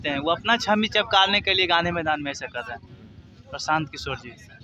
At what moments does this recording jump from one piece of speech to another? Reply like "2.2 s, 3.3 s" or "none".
none